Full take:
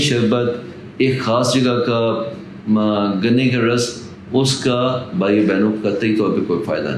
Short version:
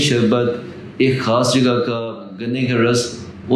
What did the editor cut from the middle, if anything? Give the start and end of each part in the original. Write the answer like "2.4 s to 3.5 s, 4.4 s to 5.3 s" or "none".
2.5 s to 3.3 s

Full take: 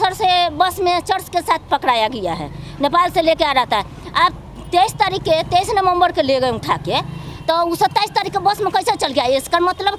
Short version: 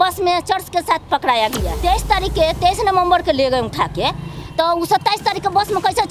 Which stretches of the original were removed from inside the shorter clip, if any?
2.3 s to 4.6 s

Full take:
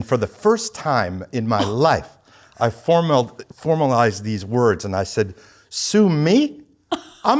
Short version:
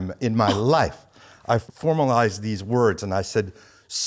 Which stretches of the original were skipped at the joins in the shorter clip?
2.8 s to 3.5 s

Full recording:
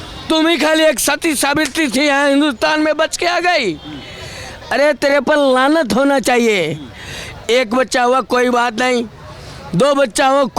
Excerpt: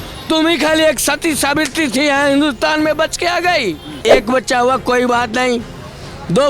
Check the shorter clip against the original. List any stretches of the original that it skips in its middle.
3.9 s to 7.3 s

